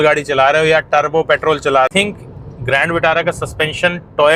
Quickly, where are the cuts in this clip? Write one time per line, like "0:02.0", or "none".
0:01.9